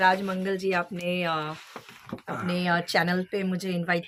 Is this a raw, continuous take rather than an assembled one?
yes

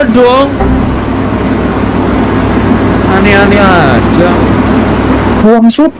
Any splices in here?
no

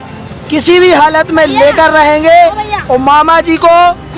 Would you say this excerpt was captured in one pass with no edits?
yes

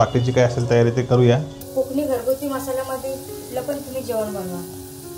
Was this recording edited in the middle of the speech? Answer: yes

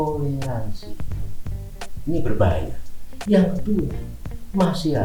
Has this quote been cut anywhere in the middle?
no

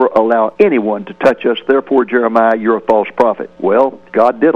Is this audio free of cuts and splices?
yes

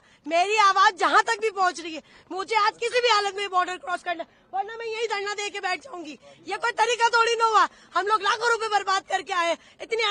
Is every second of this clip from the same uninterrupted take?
yes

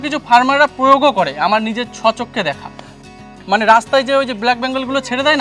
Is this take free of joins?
no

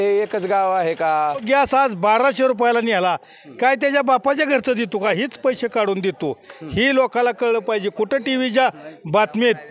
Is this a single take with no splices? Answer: no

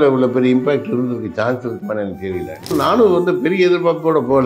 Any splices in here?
yes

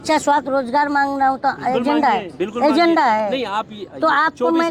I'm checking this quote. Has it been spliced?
no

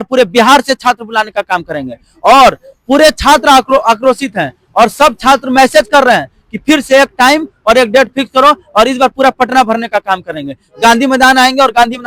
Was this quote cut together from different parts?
no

